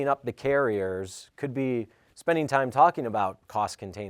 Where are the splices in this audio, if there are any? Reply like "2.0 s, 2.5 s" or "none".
none